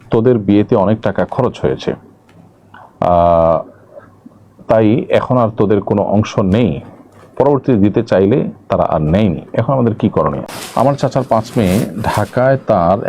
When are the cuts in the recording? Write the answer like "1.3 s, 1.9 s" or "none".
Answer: 10.4 s